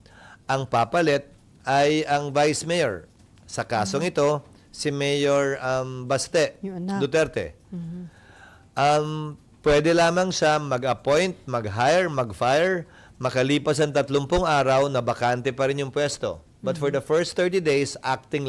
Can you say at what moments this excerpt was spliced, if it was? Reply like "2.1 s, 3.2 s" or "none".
none